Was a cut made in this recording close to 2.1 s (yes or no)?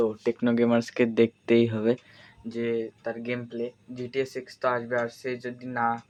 no